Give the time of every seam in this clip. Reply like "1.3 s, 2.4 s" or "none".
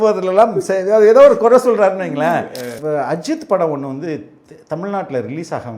2.7 s